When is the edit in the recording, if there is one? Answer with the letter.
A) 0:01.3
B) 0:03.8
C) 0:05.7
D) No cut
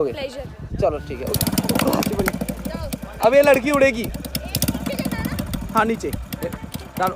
A